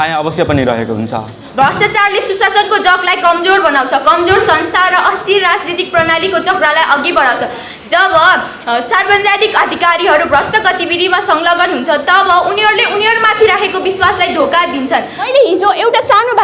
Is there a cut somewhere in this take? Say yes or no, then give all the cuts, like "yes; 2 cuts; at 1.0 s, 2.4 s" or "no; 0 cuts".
yes; 2 cuts; at 1.4 s, 15.2 s